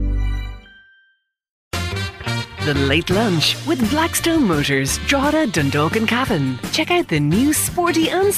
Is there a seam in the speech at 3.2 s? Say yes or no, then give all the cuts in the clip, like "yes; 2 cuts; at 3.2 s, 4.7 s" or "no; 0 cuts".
no; 1 cut; at 1.8 s